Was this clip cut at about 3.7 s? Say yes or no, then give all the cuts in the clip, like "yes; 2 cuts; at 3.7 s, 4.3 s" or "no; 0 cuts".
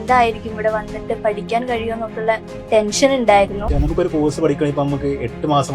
yes; 1 cut; at 3.7 s